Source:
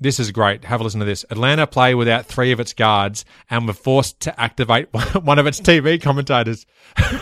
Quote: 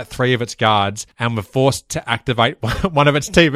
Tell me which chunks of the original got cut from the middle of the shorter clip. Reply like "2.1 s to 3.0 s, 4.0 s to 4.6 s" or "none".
3.3 s to 3.4 s